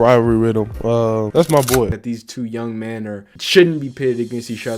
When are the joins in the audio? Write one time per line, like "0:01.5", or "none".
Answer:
0:02.1
0:03.3

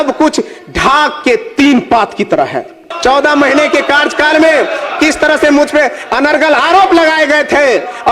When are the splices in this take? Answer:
0:02.9

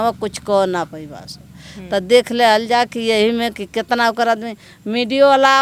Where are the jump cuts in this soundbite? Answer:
none

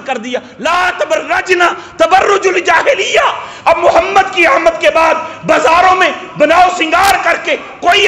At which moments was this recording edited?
none

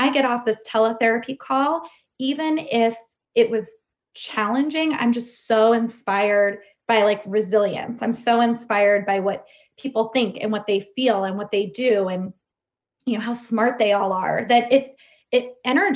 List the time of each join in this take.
none

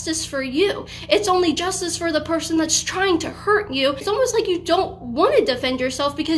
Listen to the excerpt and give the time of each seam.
0:04.0

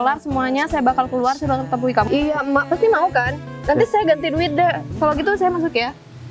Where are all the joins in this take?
0:02.1

